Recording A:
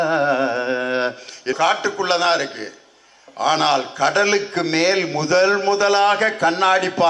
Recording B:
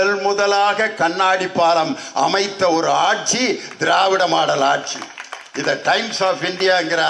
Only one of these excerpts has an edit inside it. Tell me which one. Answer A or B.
A